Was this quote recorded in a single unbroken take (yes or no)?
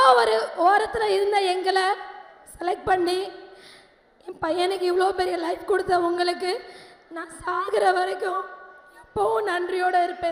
yes